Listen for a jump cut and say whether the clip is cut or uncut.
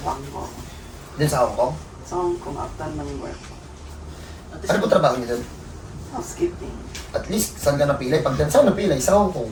uncut